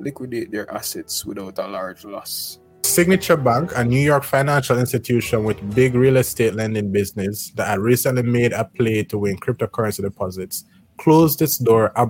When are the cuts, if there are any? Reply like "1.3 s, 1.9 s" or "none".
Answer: 2.9 s